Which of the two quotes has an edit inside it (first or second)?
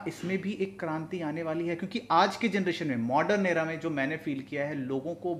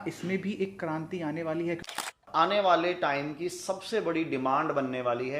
second